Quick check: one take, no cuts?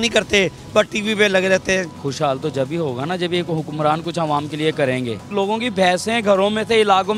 no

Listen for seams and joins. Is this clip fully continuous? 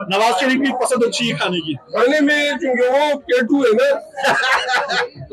yes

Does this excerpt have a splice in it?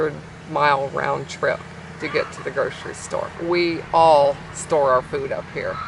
no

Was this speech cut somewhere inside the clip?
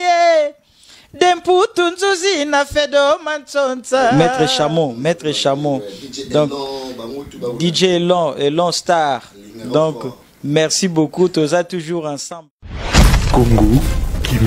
yes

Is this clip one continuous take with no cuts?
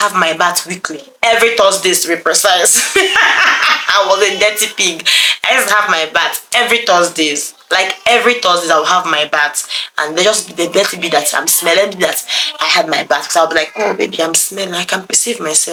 yes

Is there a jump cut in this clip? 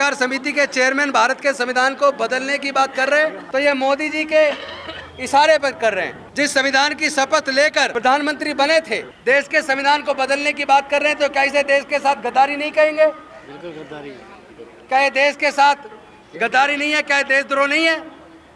yes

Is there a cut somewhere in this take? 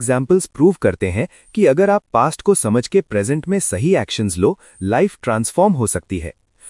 no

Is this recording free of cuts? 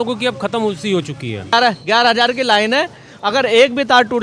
no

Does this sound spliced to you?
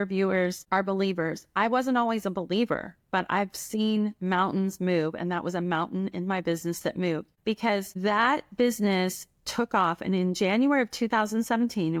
no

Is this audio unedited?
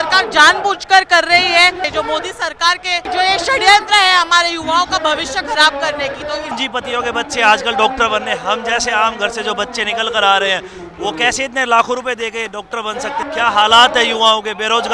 no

